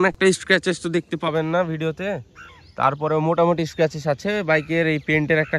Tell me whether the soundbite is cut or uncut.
uncut